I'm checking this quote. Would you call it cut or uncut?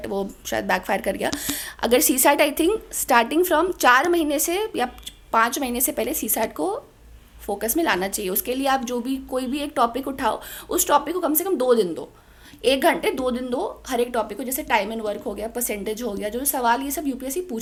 uncut